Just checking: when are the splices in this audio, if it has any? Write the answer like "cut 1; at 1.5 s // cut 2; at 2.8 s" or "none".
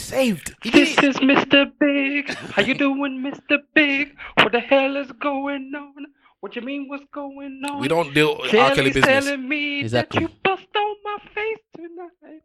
none